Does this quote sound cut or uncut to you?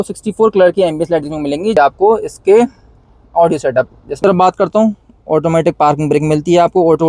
cut